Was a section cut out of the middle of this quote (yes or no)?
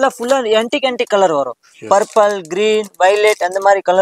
no